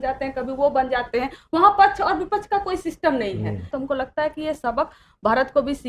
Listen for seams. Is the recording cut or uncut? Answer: cut